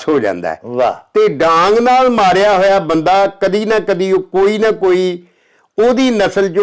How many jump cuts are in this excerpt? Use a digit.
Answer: 0